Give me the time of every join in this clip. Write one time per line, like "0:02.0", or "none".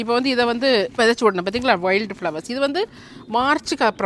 0:00.9